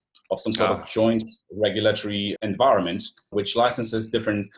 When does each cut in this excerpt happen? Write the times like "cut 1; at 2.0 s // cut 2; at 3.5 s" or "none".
cut 1; at 2.3 s // cut 2; at 3.3 s